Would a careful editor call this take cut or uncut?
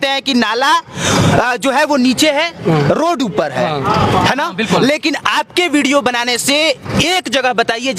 uncut